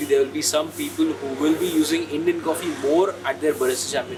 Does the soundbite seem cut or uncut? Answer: uncut